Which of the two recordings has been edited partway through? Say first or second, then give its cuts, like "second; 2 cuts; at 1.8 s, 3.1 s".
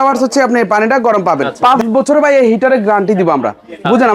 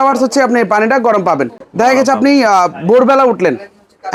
first; 1 cut; at 1.5 s